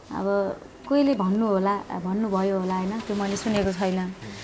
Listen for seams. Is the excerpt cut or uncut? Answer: uncut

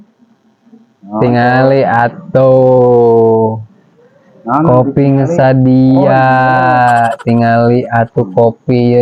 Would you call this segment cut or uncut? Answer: uncut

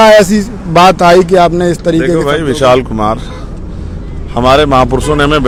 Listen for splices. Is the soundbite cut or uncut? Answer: uncut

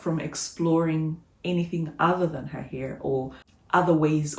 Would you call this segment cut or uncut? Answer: uncut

